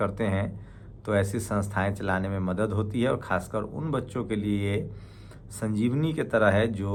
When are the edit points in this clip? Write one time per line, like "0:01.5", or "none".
none